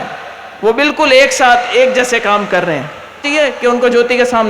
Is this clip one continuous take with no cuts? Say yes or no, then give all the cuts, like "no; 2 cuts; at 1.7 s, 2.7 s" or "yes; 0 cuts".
no; 1 cut; at 3.3 s